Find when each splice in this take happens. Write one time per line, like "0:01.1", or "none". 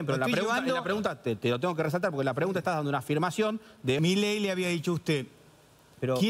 0:04.0